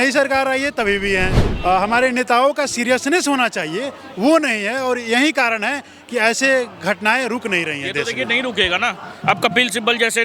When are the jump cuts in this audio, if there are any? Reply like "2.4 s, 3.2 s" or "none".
1.4 s